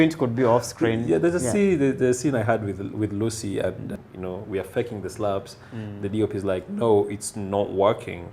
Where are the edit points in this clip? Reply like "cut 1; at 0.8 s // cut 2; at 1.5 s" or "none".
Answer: cut 1; at 3.9 s